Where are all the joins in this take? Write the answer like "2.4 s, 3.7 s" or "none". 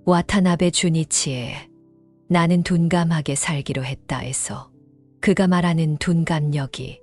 none